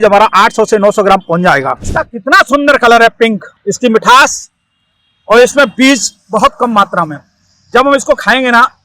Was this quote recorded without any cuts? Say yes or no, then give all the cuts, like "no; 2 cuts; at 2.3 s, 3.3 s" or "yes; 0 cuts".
no; 2 cuts; at 1.8 s, 3.5 s